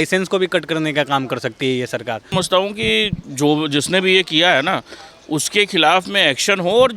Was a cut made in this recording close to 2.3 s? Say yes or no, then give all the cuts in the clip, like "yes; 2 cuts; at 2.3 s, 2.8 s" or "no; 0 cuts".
yes; 1 cut; at 2.3 s